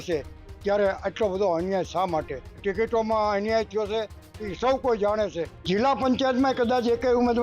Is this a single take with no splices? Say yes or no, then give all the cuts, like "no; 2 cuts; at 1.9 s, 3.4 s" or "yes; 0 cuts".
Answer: no; 2 cuts; at 2.6 s, 5.6 s